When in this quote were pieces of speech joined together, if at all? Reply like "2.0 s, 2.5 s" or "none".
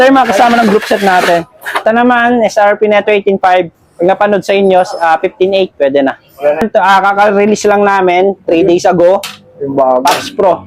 1.8 s, 6.6 s